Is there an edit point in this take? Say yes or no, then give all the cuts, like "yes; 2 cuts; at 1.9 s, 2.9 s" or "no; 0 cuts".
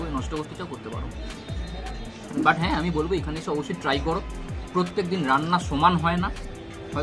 no; 0 cuts